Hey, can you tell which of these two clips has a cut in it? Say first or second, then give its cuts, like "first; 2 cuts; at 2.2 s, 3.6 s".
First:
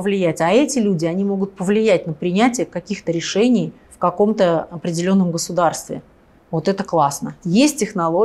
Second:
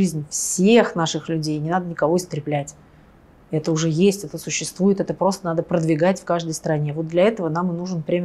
first; 2 cuts; at 3.8 s, 7.4 s